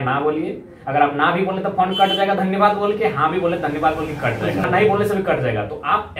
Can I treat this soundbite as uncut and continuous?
no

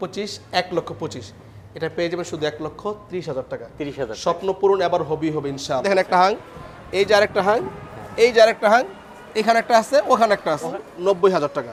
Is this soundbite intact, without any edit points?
yes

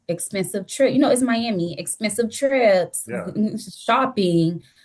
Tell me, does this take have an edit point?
no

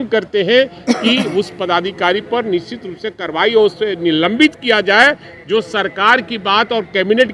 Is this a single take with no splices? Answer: yes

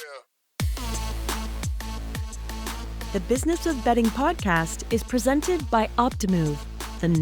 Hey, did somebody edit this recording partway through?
yes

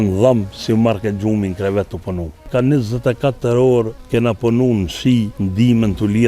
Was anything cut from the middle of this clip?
yes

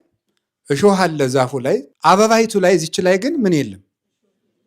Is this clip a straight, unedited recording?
no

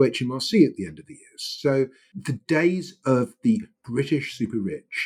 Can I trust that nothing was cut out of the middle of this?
yes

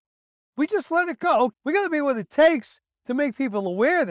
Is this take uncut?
no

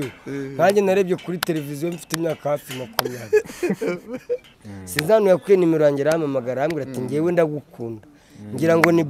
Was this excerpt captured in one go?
no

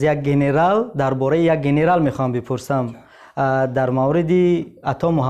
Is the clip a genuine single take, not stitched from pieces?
yes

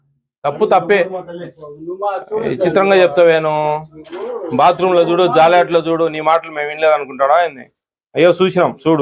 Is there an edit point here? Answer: no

